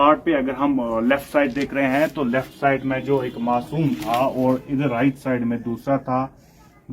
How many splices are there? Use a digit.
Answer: 0